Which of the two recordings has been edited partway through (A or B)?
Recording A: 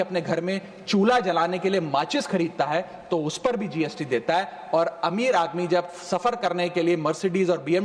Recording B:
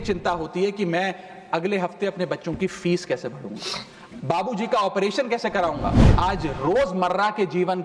B